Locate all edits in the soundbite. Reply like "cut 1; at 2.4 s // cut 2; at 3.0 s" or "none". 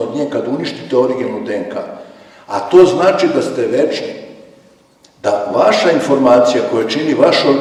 none